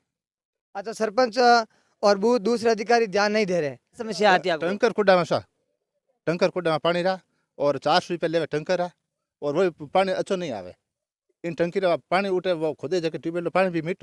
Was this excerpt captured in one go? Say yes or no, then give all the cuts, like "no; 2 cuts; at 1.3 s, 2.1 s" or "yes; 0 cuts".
no; 1 cut; at 4.0 s